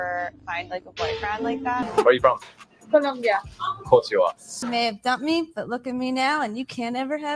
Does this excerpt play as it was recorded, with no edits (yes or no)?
no